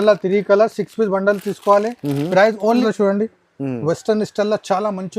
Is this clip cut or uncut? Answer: cut